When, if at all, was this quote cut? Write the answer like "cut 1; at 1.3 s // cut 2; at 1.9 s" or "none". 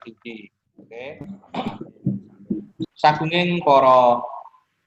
cut 1; at 1.0 s